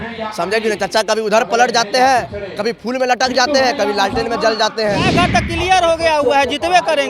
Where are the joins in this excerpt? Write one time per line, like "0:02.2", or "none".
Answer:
0:05.1